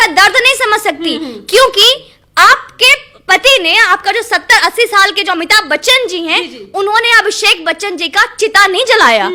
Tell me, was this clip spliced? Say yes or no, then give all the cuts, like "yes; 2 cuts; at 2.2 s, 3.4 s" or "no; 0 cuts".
no; 0 cuts